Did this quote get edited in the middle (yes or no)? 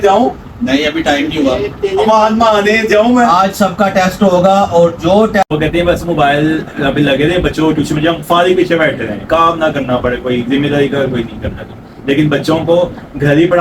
yes